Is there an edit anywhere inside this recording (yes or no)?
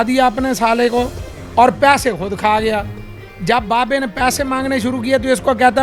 no